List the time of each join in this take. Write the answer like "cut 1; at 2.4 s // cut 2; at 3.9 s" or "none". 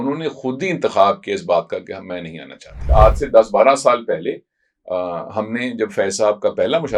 cut 1; at 2.8 s